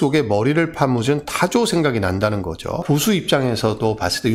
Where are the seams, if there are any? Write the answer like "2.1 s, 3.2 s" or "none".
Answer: 2.8 s